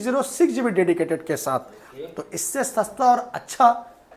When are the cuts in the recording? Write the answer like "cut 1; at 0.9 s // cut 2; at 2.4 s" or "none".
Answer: none